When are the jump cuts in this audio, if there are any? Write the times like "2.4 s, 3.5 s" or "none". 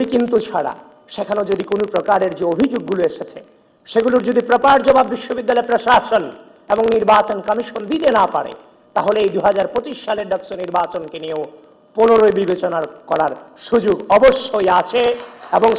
none